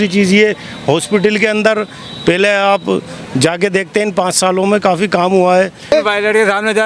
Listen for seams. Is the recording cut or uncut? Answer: cut